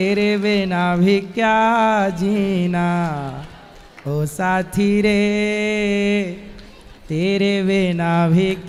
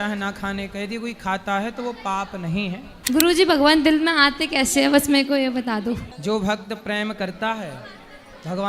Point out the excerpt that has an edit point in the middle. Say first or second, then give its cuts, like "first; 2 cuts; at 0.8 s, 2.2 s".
second; 2 cuts; at 2.9 s, 6.1 s